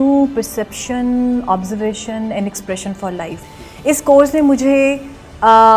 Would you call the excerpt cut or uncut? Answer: cut